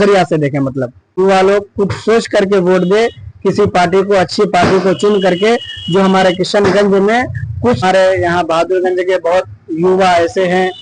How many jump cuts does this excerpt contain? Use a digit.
2